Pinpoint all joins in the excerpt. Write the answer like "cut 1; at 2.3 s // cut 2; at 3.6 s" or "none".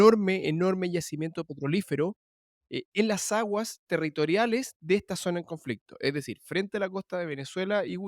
none